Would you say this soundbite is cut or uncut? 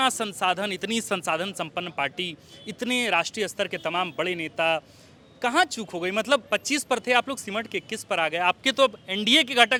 uncut